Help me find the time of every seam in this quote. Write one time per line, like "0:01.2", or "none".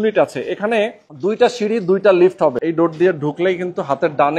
0:02.6